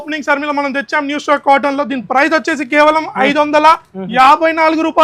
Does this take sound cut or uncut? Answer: uncut